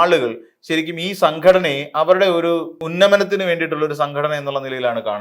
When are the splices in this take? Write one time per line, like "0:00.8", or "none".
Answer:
0:02.7